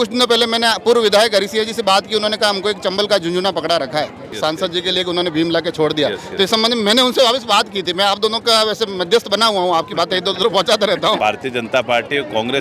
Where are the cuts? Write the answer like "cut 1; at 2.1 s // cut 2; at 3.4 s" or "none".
cut 1; at 4.3 s // cut 2; at 11.2 s

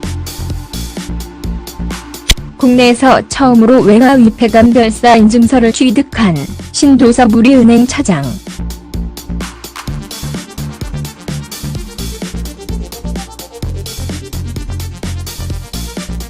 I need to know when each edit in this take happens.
cut 1; at 4.2 s

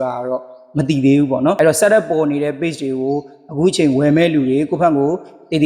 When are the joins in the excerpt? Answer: cut 1; at 1.6 s

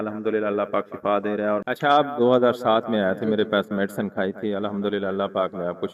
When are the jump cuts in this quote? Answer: cut 1; at 1.6 s

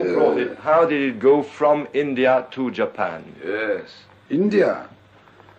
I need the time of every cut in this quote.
cut 1; at 4.0 s

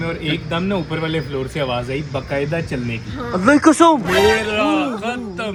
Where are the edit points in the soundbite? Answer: none

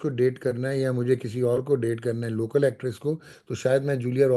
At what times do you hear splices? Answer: none

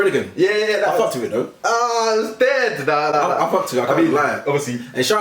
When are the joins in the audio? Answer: none

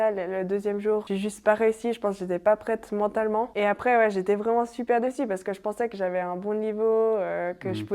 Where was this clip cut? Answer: cut 1; at 1.0 s // cut 2; at 3.5 s

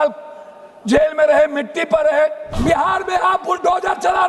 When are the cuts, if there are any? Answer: cut 1; at 2.5 s

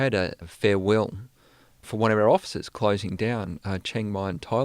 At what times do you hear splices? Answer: cut 1; at 1.9 s

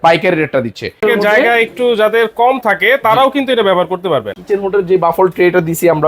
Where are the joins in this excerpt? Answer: cut 1; at 1.0 s // cut 2; at 4.3 s

